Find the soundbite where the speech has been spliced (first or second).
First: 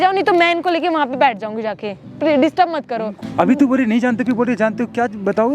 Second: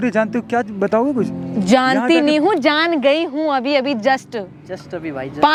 first